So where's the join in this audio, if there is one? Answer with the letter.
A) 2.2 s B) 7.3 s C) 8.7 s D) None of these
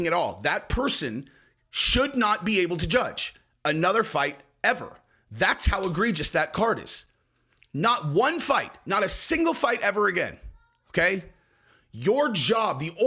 D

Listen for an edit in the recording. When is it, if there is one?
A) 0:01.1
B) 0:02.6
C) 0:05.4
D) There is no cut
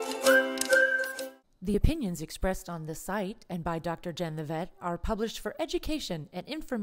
A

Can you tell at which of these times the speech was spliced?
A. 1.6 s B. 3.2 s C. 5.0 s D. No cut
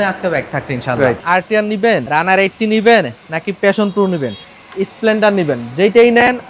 A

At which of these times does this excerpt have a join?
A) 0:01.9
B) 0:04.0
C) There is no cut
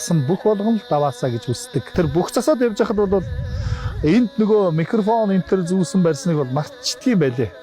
A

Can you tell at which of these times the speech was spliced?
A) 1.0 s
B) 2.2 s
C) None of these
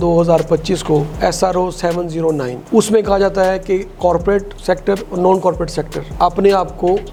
C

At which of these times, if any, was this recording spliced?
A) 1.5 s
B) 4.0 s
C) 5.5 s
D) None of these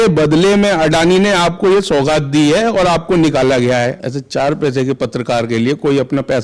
B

